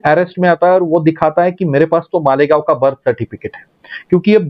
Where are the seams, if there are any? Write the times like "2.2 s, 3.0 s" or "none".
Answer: none